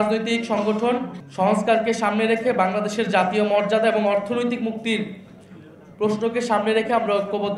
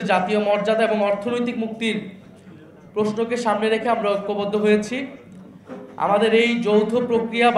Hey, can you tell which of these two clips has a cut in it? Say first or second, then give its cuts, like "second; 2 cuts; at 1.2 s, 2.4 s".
first; 1 cut; at 1.2 s